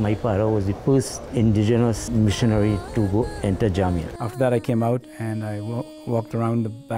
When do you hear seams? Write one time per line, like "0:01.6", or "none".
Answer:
0:00.8
0:02.0
0:04.1